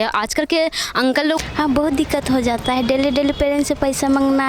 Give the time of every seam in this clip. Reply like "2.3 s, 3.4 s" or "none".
1.4 s